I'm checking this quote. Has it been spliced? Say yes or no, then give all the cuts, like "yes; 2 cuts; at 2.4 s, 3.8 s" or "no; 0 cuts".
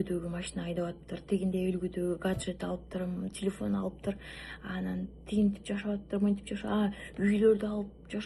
no; 0 cuts